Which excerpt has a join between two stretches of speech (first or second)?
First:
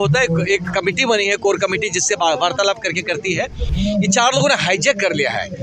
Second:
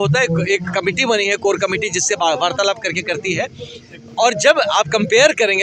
first